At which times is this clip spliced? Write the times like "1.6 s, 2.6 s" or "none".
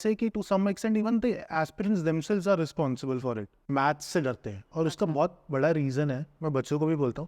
3.7 s